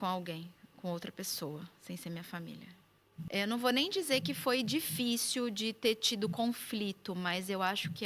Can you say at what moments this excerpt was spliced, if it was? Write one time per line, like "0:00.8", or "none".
0:03.3